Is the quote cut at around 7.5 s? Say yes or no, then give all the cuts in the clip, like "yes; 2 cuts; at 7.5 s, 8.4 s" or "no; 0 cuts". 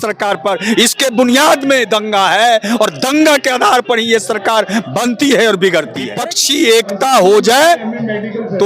no; 1 cut; at 6.0 s